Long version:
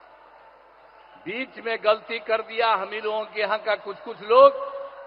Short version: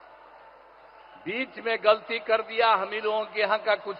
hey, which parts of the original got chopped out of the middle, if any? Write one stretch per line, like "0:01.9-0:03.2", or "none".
none